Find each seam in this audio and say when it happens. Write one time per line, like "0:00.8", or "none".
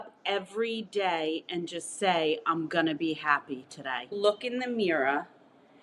0:04.2

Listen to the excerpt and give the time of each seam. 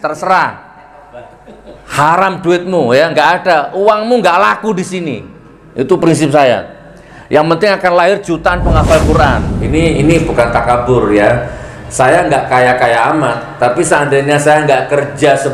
0:09.5

